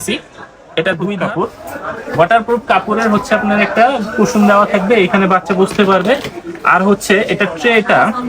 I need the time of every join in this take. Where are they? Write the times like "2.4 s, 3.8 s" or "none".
1.2 s